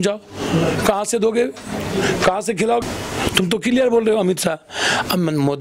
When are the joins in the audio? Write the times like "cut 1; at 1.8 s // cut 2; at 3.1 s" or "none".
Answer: cut 1; at 2.8 s